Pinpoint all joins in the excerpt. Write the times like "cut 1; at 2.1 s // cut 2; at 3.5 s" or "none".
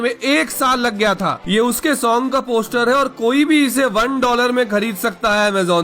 cut 1; at 1.4 s